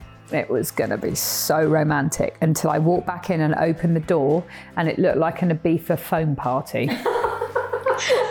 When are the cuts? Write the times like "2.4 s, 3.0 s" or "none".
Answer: none